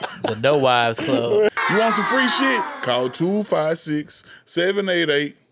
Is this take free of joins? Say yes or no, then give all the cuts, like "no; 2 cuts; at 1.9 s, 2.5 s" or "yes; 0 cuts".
no; 1 cut; at 1.5 s